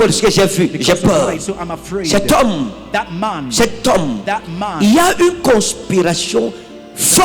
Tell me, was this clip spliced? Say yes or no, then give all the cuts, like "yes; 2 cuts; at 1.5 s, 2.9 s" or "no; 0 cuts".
no; 0 cuts